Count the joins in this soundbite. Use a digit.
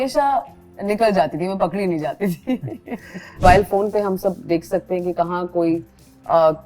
1